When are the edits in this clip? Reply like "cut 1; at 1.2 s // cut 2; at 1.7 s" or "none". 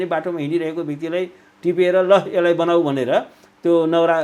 none

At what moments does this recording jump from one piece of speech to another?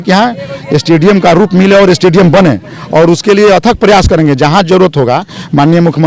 none

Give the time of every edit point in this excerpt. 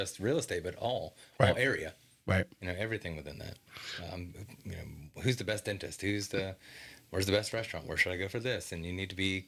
none

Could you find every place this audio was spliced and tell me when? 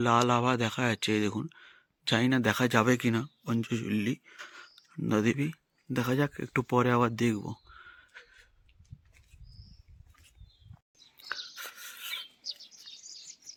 none

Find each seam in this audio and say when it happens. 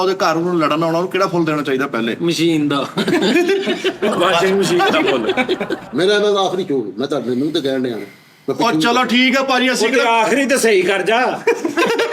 cut 1; at 5.7 s

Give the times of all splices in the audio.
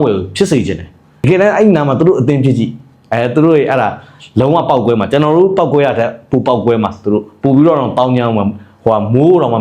cut 1; at 1.2 s

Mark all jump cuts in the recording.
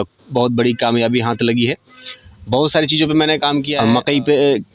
cut 1; at 3.7 s

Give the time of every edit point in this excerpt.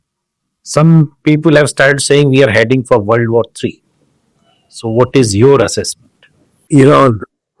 cut 1; at 6.6 s

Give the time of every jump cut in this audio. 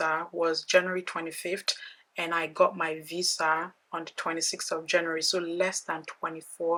none

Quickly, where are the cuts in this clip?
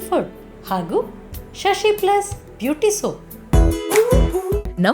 cut 1; at 3.3 s

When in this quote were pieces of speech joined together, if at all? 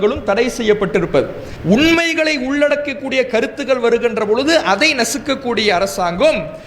cut 1; at 1.5 s

